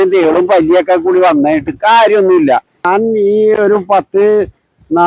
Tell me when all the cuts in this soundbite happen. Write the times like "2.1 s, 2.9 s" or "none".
2.8 s